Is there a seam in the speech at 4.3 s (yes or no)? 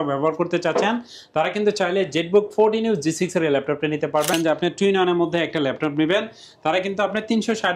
yes